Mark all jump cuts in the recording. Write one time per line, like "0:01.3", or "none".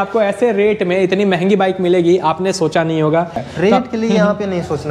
0:03.5